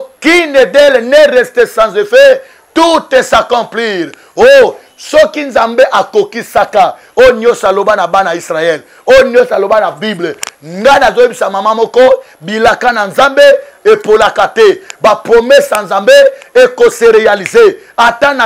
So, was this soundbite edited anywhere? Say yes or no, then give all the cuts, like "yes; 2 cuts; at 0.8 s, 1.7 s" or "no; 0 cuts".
no; 0 cuts